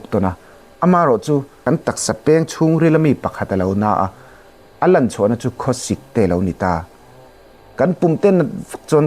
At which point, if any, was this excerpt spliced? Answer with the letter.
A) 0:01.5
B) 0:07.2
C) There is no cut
A